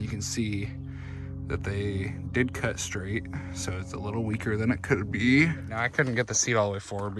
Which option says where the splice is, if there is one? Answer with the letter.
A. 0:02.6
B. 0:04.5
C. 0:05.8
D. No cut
C